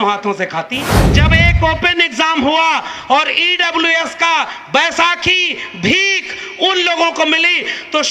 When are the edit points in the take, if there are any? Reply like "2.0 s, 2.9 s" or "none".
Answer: 1.0 s